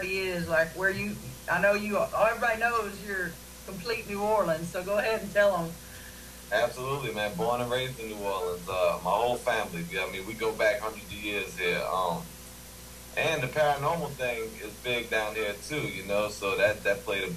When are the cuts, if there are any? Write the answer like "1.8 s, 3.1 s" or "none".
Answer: 10.8 s